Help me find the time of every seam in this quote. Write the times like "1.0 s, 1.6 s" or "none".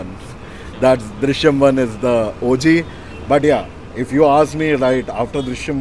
none